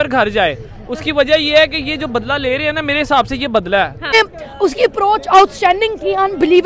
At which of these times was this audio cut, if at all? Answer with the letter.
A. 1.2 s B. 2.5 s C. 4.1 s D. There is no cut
C